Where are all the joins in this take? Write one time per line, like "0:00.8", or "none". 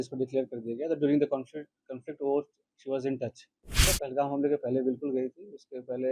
0:03.9